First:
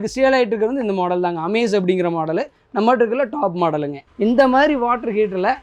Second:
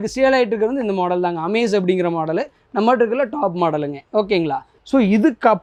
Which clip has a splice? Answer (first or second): first